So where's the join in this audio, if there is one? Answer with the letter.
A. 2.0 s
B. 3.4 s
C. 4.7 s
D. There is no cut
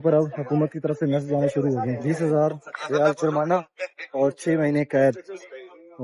A